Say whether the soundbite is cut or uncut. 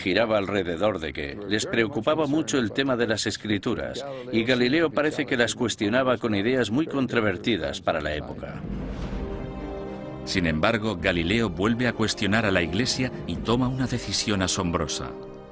cut